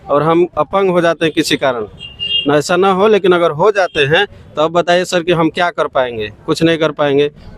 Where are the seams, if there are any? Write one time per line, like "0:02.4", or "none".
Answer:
none